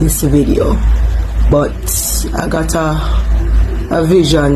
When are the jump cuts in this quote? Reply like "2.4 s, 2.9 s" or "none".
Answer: 1.5 s